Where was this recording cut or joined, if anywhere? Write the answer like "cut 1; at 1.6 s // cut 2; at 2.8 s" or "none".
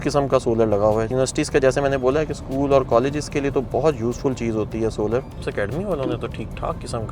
cut 1; at 1.1 s // cut 2; at 5.4 s